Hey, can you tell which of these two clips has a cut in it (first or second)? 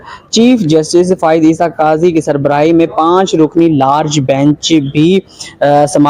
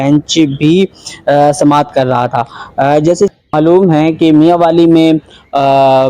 second